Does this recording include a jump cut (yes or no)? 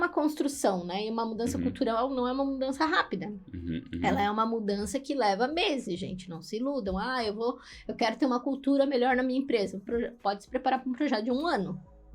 no